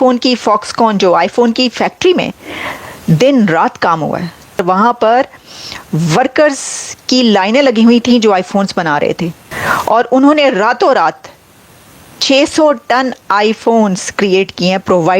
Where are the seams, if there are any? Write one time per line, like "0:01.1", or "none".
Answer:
0:04.6
0:09.5